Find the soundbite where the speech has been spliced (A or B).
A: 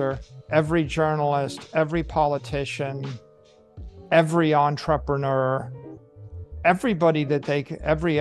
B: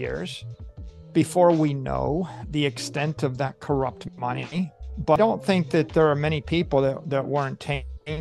B